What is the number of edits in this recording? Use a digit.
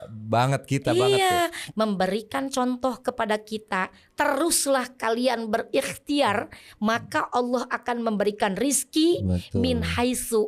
1